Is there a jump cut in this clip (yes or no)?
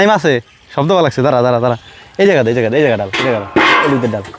no